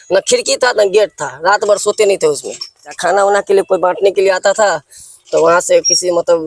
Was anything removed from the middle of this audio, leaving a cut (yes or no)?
yes